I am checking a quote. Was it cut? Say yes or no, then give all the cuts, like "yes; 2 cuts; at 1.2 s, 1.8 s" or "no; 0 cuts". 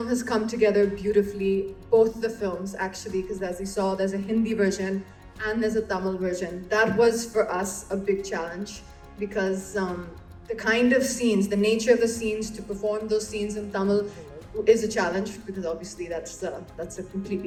no; 0 cuts